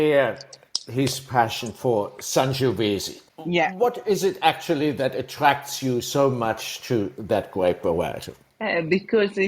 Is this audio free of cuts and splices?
yes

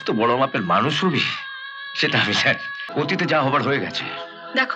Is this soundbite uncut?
no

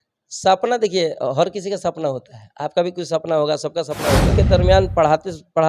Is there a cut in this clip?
yes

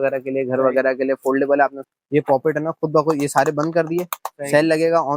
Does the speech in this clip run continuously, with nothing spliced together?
no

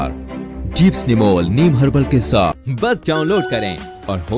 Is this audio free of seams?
no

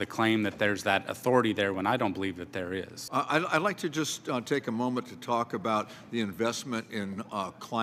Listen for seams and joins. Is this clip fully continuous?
yes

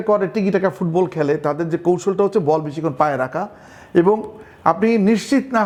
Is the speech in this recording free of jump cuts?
yes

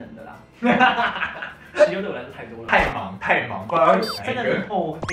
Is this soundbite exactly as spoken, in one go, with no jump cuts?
no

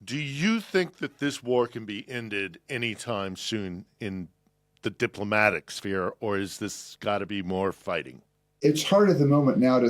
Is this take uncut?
no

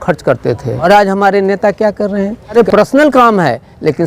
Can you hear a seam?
yes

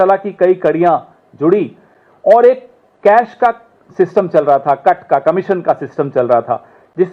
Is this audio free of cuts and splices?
yes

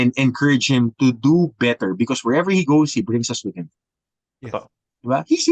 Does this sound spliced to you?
no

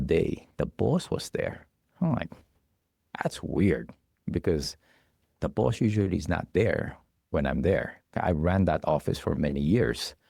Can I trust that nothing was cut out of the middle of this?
yes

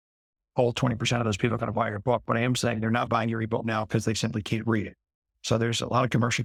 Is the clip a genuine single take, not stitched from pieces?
yes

